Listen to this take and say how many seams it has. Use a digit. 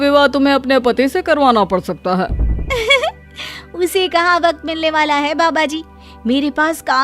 0